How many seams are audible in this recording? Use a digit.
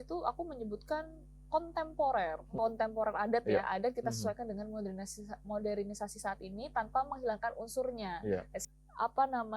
2